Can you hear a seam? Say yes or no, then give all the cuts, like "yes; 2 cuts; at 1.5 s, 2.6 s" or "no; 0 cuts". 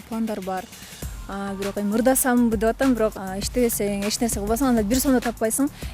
yes; 1 cut; at 3.1 s